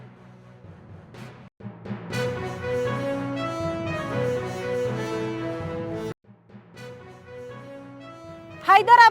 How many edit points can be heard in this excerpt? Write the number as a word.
one